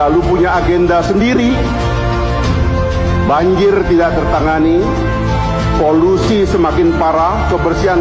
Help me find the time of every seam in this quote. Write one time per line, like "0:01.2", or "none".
none